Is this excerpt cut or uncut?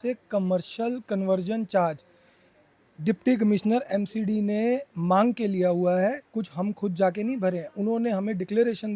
uncut